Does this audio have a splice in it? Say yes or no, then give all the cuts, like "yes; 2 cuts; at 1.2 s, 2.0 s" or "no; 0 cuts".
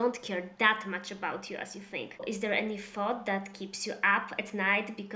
yes; 1 cut; at 2.2 s